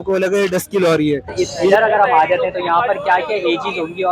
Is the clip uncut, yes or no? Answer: no